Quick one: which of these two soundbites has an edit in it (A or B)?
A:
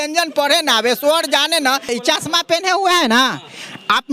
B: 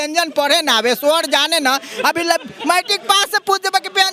A